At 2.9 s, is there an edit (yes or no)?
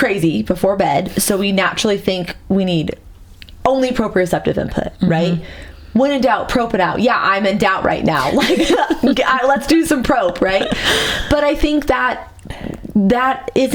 no